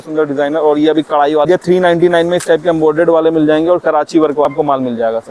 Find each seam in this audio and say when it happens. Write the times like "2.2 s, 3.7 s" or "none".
1.5 s, 4.5 s